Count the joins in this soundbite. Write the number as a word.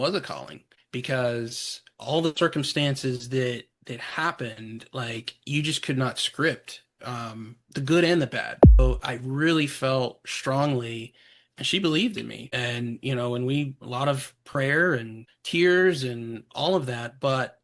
one